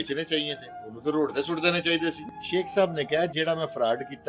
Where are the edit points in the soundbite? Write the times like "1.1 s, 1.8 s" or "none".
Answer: 2.2 s

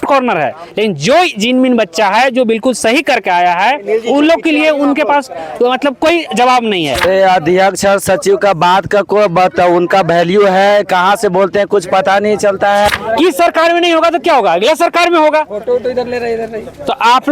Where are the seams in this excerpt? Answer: 7.0 s, 12.9 s

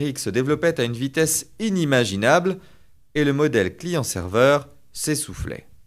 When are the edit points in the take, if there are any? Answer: 2.0 s

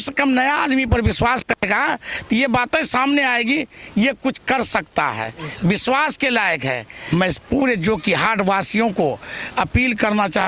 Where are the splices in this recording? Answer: 6.9 s

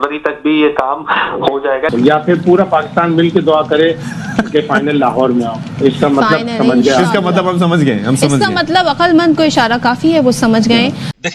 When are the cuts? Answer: 1.9 s

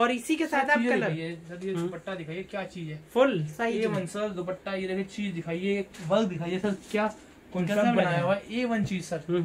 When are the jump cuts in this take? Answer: none

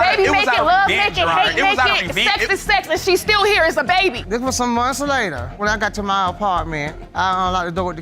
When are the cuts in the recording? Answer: 4.2 s

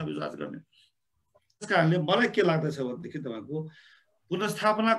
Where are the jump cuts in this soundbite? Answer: 1.7 s

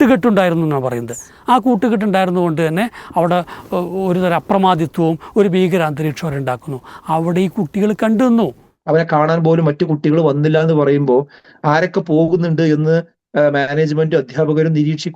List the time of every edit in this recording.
8.7 s

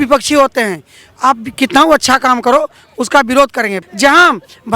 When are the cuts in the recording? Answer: 3.8 s

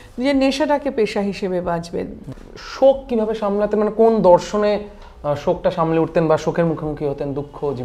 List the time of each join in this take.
none

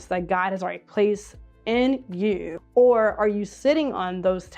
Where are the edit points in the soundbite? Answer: 2.5 s

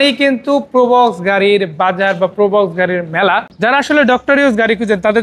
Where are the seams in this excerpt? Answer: 3.5 s

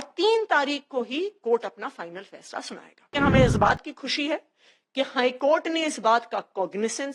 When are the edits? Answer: 3.1 s

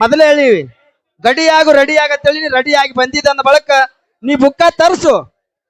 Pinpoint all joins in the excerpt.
none

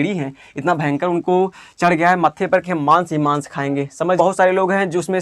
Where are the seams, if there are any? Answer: 4.2 s

